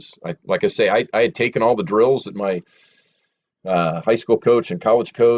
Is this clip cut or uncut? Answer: uncut